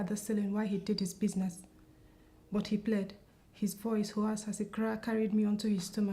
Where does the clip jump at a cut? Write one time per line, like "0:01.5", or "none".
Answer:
0:04.1